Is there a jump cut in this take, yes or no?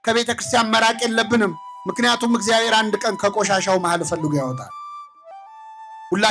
no